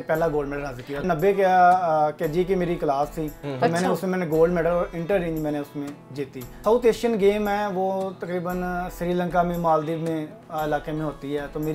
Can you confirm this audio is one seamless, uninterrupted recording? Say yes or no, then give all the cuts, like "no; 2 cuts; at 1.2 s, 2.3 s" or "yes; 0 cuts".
no; 2 cuts; at 1.0 s, 6.6 s